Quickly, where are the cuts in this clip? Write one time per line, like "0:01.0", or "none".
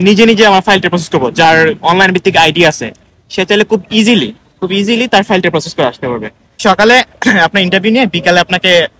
0:06.6